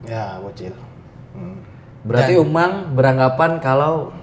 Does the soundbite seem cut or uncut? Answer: cut